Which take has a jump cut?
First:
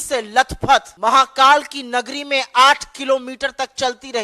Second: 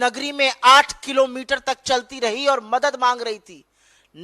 first; 1 cut; at 0.9 s

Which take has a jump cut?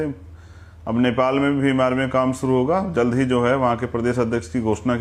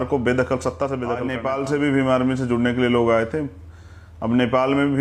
second; 1 cut; at 1.3 s

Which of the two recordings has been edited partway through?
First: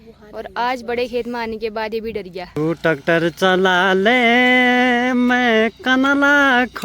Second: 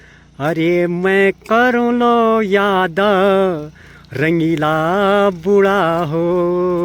first; 1 cut; at 2.6 s

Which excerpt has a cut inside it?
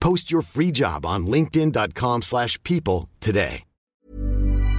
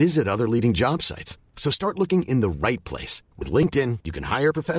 first; 1 cut; at 3.8 s

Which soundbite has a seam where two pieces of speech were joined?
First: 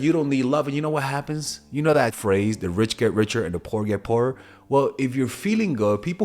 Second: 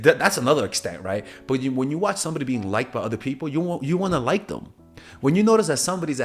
first; 1 cut; at 2.2 s

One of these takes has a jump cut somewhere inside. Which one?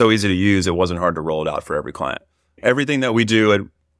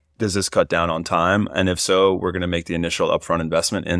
first; 1 cut; at 2.6 s

